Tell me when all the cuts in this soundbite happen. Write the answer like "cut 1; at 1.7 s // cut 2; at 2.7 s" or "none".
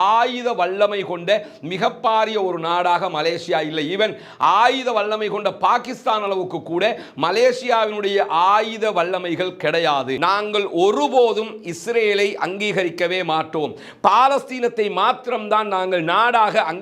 cut 1; at 10.1 s